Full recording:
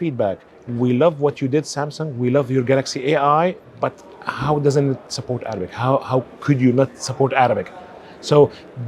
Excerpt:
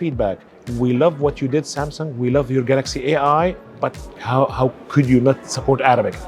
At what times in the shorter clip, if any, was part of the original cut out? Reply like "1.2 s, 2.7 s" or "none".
4.1 s